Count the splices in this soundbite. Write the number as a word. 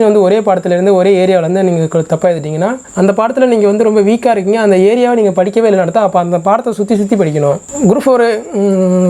two